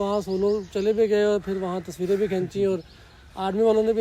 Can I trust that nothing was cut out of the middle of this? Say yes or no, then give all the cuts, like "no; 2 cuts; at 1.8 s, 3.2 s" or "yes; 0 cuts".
yes; 0 cuts